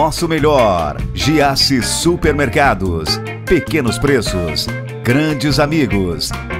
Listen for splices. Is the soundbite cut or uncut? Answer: uncut